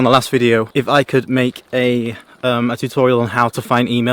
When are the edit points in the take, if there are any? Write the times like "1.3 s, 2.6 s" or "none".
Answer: none